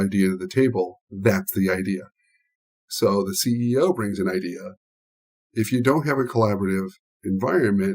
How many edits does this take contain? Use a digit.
1